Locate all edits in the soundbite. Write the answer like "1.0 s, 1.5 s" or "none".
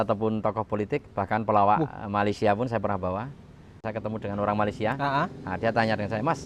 3.8 s